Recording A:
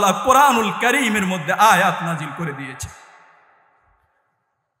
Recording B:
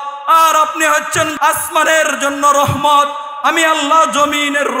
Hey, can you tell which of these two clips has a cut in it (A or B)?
B